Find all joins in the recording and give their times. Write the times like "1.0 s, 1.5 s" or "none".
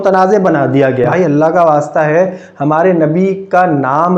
1.1 s